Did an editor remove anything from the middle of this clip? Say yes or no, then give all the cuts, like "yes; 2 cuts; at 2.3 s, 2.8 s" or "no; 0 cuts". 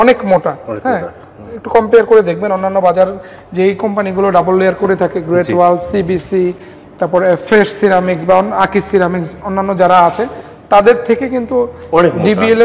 no; 0 cuts